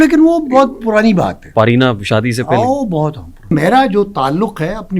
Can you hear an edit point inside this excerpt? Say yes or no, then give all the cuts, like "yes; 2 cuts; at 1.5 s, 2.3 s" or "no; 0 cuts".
yes; 1 cut; at 3.5 s